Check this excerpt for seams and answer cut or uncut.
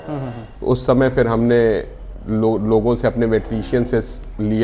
uncut